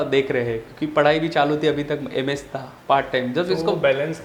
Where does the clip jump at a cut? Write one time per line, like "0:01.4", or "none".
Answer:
none